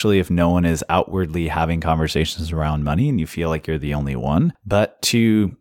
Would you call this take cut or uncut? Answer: cut